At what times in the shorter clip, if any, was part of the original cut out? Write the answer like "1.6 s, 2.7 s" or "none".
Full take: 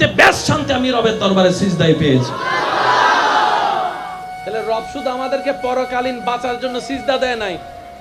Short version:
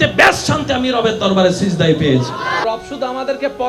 2.6 s

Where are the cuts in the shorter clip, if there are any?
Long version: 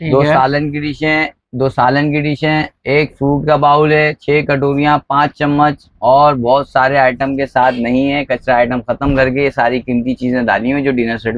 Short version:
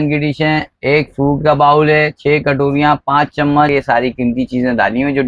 3.7 s

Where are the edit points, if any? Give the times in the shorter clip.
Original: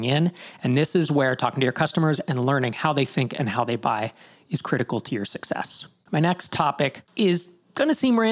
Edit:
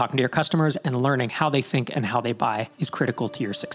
2.7 s

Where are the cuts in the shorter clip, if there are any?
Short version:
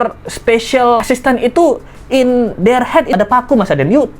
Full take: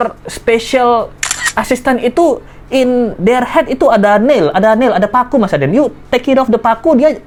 1.0 s, 3.1 s

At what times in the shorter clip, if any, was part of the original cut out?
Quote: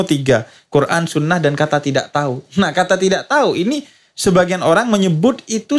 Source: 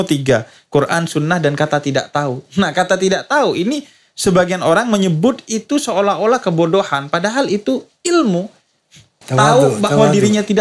none

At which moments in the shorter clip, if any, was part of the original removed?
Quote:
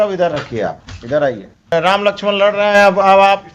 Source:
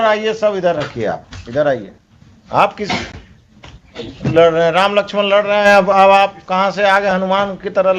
1.7 s

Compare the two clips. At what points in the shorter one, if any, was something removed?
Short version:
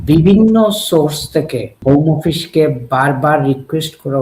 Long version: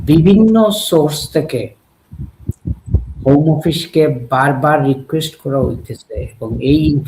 1.7 s

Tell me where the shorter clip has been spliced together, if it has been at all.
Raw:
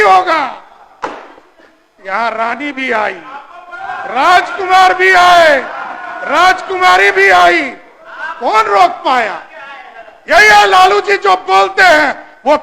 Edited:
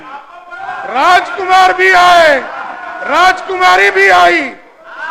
none

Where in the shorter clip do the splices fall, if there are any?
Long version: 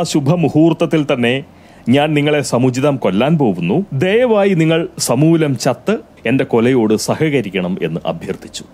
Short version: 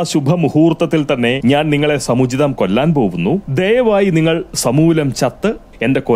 1.4 s

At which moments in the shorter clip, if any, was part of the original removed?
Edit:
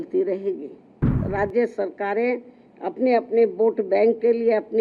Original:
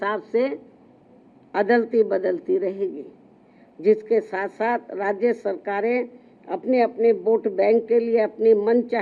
1.2 s

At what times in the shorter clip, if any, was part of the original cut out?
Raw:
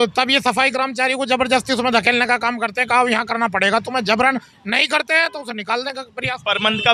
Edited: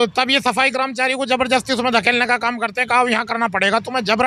none

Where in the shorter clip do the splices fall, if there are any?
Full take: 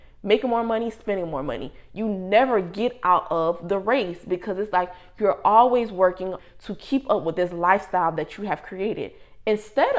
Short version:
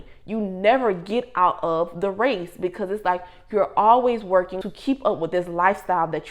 4.6 s

